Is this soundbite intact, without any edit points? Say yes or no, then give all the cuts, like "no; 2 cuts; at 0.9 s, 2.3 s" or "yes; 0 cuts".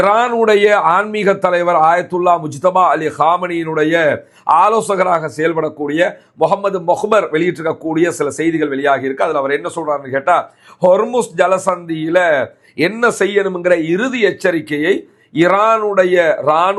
yes; 0 cuts